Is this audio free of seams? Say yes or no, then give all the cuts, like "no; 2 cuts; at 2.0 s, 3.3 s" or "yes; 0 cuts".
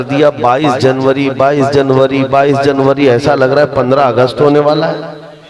yes; 0 cuts